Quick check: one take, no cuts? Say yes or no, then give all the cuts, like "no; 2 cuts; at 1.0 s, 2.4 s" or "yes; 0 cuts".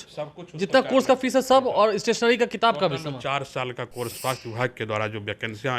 no; 1 cut; at 4.2 s